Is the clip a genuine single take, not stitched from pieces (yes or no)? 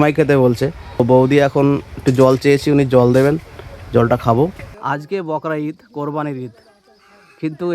no